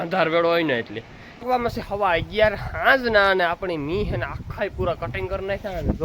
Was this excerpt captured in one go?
no; 1 cut; at 1.4 s

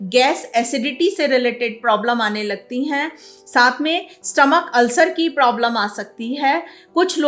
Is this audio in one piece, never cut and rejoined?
yes; 0 cuts

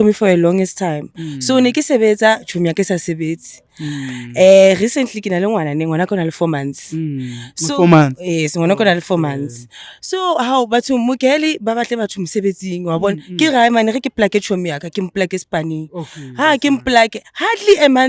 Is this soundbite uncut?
yes; 0 cuts

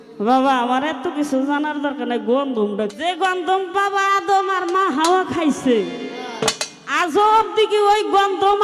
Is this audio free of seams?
no; 1 cut; at 2.9 s

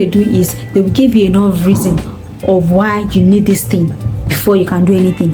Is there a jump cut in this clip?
no; 0 cuts

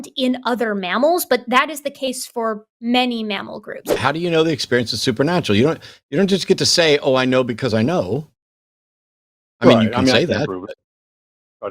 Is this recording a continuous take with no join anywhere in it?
no; 1 cut; at 3.9 s

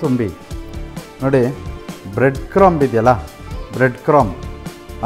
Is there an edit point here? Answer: yes; 1 cut; at 0.9 s

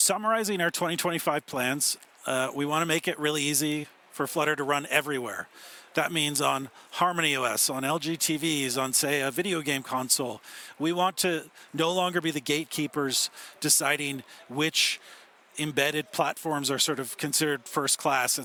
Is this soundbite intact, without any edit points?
yes; 0 cuts

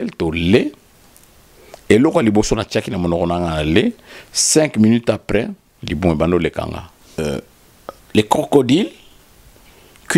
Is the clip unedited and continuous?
no; 1 cut; at 7.2 s

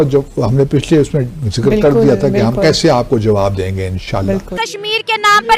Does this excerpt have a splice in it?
yes; 1 cut; at 4.5 s

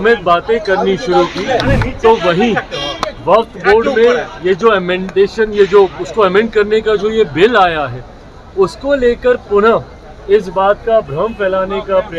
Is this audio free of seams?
yes; 0 cuts

